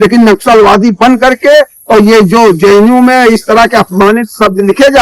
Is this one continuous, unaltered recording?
yes; 0 cuts

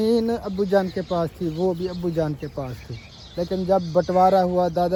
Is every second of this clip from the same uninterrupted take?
yes; 0 cuts

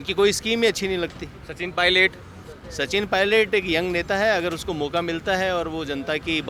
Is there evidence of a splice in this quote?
no; 0 cuts

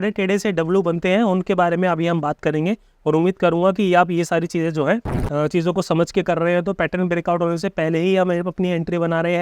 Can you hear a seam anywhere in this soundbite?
yes; 1 cut; at 5.1 s

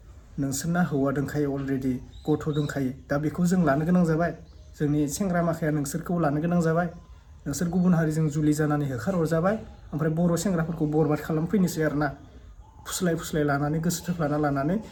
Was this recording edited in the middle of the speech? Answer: no; 0 cuts

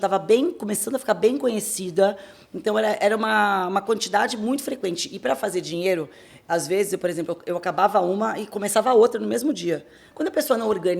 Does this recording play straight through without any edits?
no; 1 cut; at 10.0 s

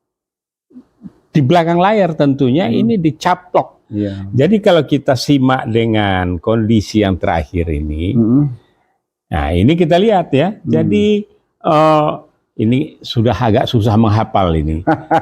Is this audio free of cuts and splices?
no; 1 cut; at 3.8 s

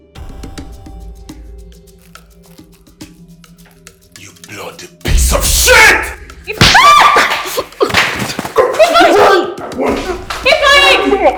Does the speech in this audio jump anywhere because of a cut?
no; 0 cuts

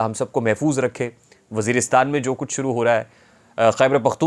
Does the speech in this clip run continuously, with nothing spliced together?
yes; 0 cuts

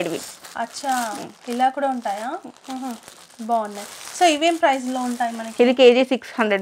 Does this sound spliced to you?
no; 0 cuts

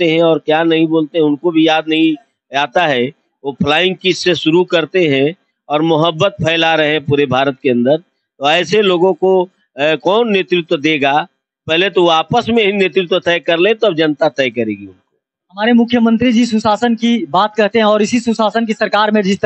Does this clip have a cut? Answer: no; 0 cuts

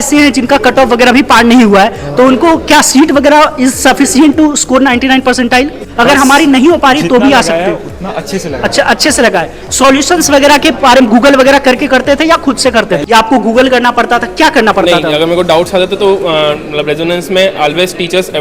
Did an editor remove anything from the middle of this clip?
yes; 2 cuts; at 5.8 s, 13.0 s

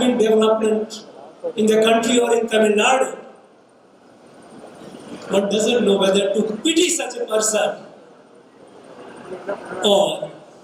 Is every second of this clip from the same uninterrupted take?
yes; 0 cuts

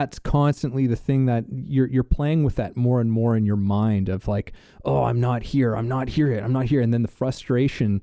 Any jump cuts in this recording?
no; 0 cuts

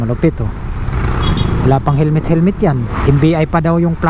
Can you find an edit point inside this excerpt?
yes; 1 cut; at 1.3 s

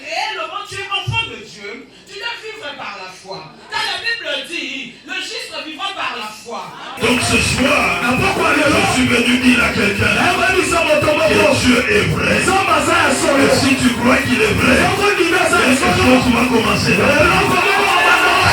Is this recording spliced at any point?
yes; 1 cut; at 6.9 s

